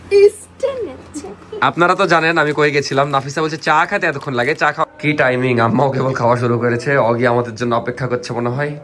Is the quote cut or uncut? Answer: cut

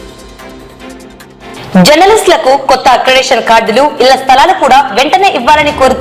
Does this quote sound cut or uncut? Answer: uncut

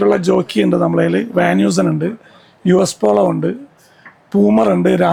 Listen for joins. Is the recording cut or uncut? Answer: uncut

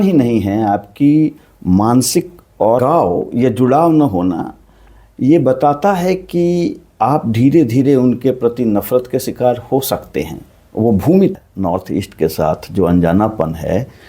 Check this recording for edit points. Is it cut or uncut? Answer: cut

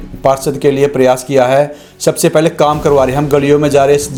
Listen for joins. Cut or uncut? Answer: uncut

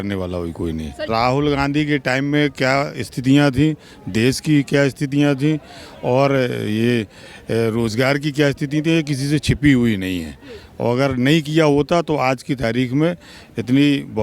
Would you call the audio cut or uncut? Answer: cut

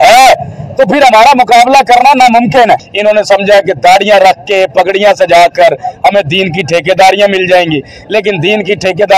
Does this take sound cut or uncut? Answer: cut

